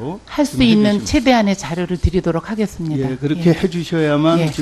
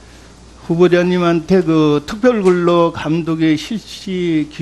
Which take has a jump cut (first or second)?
second